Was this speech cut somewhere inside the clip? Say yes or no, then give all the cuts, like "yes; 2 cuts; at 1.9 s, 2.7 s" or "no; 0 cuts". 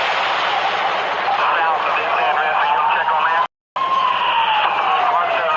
no; 0 cuts